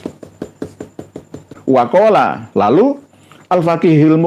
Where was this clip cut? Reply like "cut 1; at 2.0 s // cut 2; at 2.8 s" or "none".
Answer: cut 1; at 1.5 s